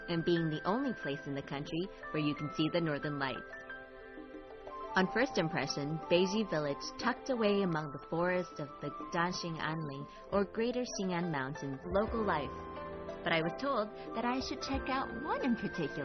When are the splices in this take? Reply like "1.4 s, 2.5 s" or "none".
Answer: none

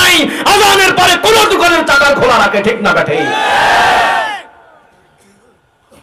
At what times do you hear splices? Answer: none

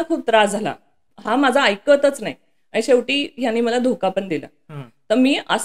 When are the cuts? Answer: none

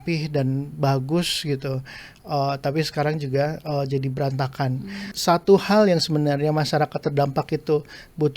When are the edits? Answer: 5.1 s

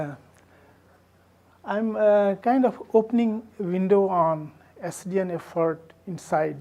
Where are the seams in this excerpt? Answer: none

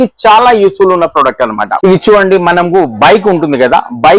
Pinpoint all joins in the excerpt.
1.7 s

